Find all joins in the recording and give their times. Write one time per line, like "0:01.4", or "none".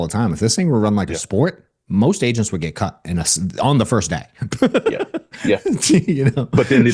none